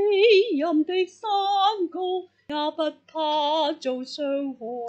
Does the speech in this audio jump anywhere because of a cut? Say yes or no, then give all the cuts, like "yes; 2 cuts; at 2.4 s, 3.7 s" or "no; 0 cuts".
yes; 1 cut; at 2.4 s